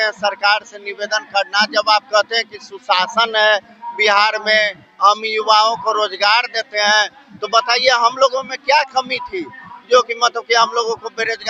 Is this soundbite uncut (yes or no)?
yes